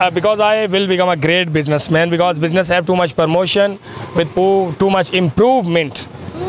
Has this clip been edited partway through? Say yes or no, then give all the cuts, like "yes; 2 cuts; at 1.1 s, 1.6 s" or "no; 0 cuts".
no; 0 cuts